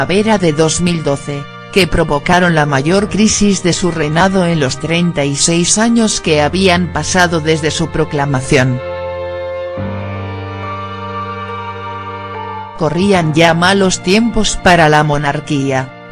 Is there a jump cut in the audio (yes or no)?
no